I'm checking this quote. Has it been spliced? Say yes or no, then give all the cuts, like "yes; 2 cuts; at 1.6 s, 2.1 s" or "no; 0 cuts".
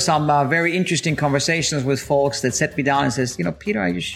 no; 0 cuts